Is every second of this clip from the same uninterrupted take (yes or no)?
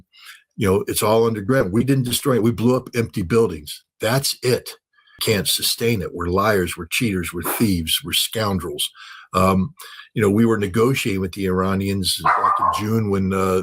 no